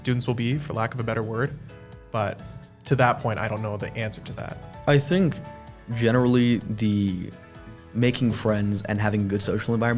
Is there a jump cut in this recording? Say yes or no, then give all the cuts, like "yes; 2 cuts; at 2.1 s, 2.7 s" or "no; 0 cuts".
yes; 1 cut; at 4.6 s